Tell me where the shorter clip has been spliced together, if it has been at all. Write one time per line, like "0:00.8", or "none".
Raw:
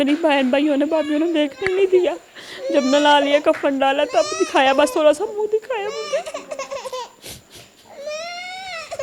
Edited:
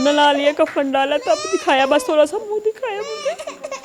none